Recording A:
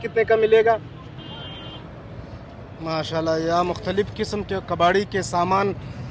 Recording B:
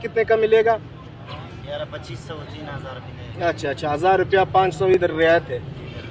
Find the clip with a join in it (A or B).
A